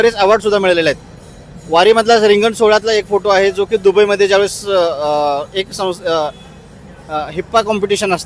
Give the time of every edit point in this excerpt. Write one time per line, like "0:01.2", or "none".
none